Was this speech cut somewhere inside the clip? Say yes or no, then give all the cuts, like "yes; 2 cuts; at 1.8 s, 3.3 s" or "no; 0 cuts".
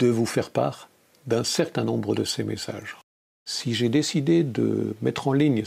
yes; 1 cut; at 3.1 s